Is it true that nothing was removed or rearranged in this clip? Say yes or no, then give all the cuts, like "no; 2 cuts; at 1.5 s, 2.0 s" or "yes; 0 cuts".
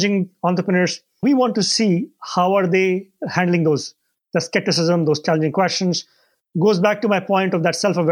no; 2 cuts; at 1.2 s, 5.2 s